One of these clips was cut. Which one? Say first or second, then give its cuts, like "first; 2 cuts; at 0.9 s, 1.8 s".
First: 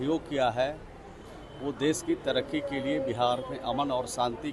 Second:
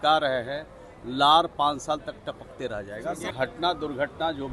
second; 1 cut; at 3.3 s